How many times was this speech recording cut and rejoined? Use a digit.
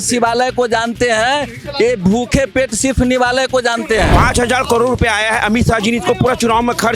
1